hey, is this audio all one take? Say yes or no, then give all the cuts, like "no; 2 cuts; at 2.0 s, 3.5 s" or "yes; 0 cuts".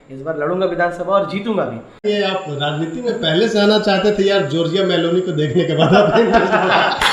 no; 1 cut; at 1.9 s